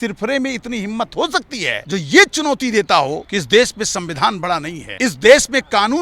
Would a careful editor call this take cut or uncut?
cut